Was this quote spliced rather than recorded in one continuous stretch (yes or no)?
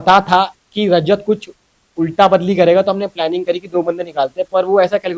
no